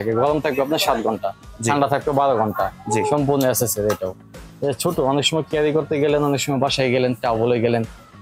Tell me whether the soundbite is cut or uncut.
uncut